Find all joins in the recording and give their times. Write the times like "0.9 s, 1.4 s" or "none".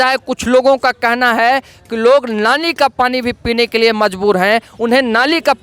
none